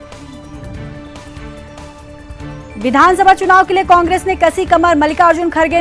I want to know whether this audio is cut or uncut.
cut